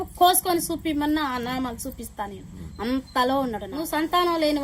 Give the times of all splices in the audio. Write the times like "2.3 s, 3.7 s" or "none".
3.7 s